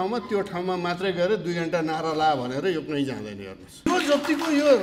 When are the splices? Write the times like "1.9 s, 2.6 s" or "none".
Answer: 3.9 s